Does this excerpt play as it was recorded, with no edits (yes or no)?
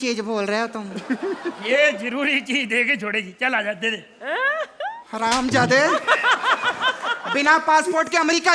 yes